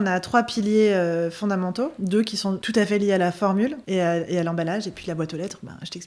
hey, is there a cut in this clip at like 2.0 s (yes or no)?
yes